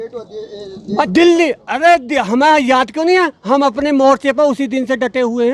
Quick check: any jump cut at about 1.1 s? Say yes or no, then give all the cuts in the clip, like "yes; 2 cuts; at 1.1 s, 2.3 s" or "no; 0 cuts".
yes; 1 cut; at 1.1 s